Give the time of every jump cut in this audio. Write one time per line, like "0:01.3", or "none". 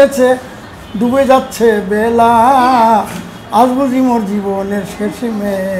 none